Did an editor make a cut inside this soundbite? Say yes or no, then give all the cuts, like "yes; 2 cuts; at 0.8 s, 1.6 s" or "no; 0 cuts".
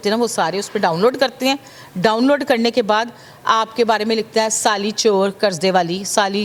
no; 0 cuts